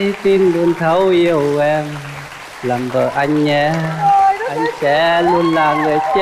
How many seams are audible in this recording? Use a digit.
0